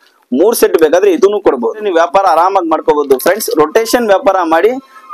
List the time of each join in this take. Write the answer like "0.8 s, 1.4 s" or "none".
1.8 s

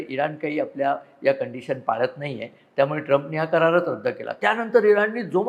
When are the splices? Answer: none

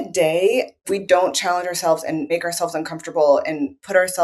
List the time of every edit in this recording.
0.9 s, 2.3 s

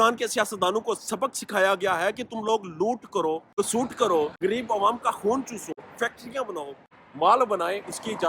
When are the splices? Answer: 3.5 s, 4.3 s, 5.8 s, 6.9 s

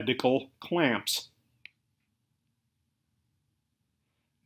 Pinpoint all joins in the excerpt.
none

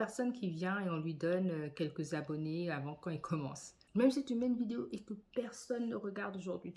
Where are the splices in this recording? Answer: 3.8 s

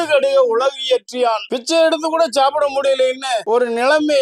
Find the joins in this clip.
none

